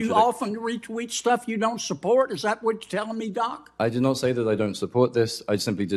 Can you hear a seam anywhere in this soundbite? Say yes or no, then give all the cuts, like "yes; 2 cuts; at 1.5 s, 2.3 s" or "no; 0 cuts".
no; 0 cuts